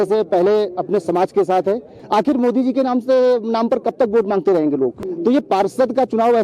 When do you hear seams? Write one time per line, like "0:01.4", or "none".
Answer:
0:01.9
0:05.0